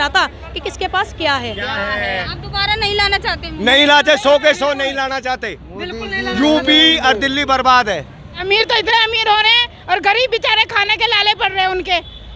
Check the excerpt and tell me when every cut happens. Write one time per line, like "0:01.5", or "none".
0:02.2
0:08.3